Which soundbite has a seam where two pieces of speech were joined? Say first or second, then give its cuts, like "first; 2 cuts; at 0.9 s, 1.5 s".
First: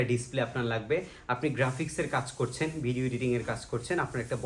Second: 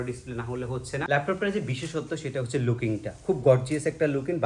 second; 1 cut; at 1.1 s